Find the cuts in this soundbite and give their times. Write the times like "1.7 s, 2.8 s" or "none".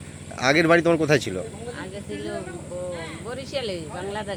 none